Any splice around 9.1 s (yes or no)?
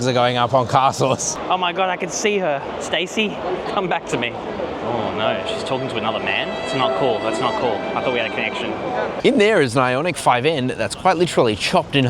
yes